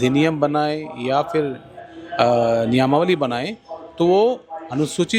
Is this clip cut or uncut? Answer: uncut